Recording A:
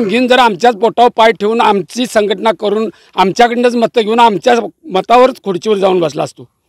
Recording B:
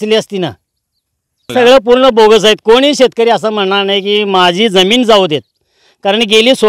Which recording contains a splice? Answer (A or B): B